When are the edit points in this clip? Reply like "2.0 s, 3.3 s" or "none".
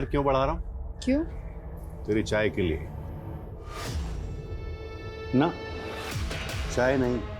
3.5 s